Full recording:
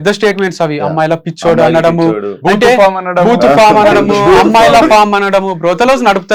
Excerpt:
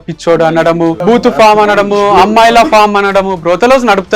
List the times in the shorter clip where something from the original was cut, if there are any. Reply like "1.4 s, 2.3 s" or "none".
1.0 s